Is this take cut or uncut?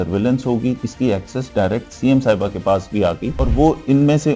cut